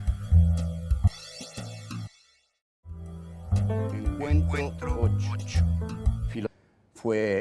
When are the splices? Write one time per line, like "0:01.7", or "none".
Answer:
none